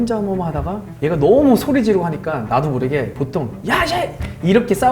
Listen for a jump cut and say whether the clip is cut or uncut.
uncut